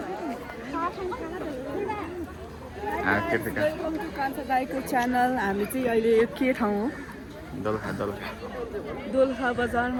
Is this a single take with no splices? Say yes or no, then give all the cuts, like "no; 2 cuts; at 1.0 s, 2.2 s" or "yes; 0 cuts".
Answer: yes; 0 cuts